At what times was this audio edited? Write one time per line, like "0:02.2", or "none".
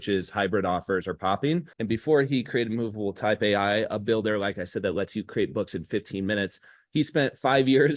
0:01.7